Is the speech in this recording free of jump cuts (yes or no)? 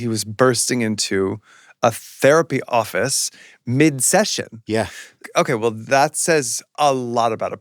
no